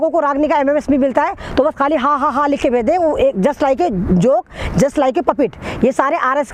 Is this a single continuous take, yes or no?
yes